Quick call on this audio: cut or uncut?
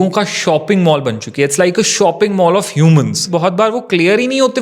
cut